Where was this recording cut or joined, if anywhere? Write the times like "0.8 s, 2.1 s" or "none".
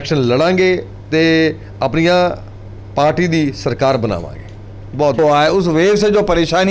5.2 s